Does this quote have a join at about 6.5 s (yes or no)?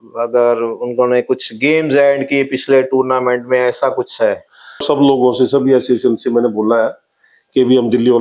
no